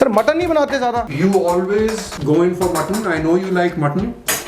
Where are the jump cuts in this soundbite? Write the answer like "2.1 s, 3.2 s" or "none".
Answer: 1.1 s, 2.1 s